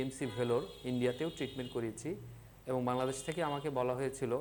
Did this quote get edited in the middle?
no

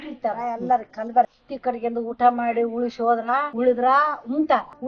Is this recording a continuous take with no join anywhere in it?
no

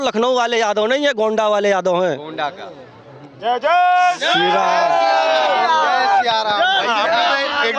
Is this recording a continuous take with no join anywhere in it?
yes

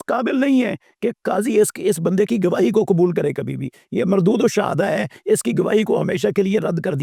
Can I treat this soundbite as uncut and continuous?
yes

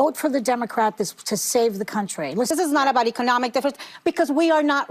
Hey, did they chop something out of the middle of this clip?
yes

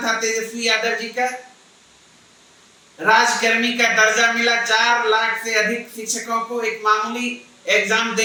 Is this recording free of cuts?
yes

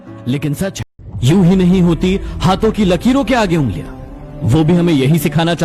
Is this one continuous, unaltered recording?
no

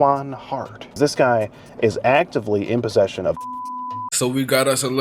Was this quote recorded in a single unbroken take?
no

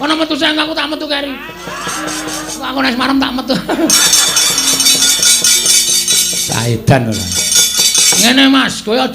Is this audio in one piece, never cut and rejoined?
no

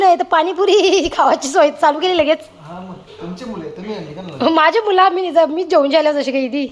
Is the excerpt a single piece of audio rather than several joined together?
yes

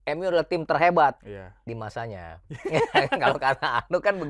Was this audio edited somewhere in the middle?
no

